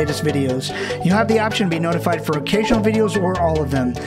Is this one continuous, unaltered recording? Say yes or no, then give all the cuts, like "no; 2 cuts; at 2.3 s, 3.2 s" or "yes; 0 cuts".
yes; 0 cuts